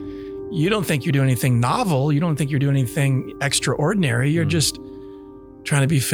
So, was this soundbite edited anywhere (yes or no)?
no